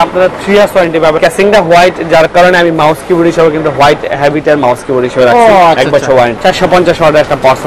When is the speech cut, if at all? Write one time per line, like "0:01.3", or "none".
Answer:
0:01.2
0:06.3